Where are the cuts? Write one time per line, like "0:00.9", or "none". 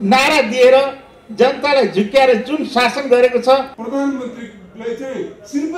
0:03.8

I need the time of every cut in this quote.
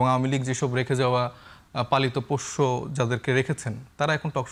none

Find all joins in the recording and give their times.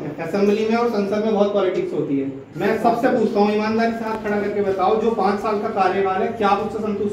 0:02.4

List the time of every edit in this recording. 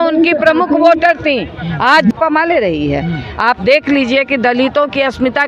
0:02.1

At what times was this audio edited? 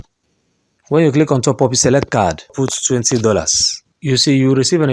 0:02.5

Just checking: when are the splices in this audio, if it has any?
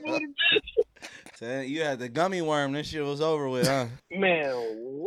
0:01.4
0:04.0

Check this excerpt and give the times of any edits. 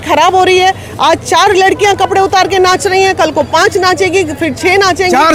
none

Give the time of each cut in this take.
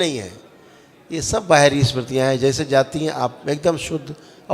none

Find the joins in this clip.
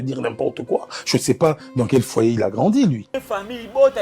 0:03.1

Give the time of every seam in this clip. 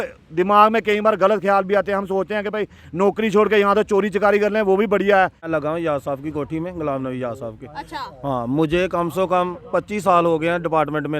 0:05.5

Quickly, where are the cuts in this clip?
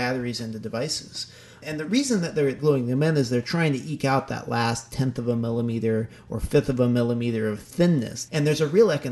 0:08.2

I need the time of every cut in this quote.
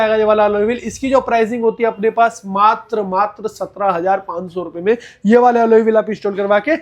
none

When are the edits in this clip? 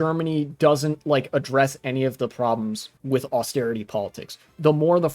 0:02.9

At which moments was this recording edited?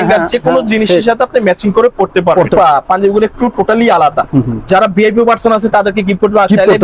0:02.5

